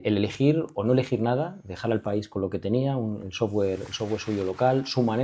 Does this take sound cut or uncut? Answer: uncut